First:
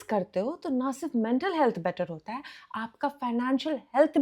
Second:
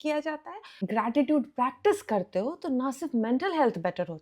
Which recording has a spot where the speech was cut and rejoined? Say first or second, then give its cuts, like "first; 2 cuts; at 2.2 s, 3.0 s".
second; 1 cut; at 0.9 s